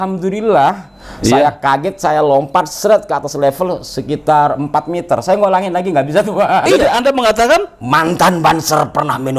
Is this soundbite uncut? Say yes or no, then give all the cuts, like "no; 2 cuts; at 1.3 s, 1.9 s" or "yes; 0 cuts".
no; 1 cut; at 6.6 s